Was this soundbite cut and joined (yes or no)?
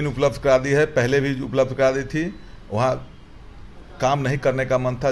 no